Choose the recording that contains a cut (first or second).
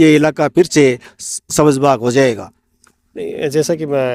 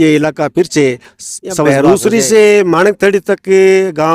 second